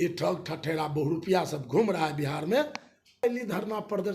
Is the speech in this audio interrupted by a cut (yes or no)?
yes